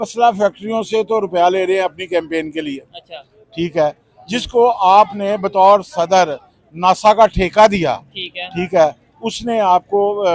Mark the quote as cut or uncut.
uncut